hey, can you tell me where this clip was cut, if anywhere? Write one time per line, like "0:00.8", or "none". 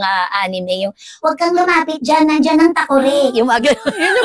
none